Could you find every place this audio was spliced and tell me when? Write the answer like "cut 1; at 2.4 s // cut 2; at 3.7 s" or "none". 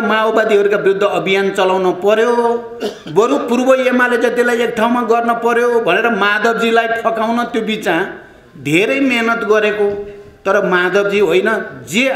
none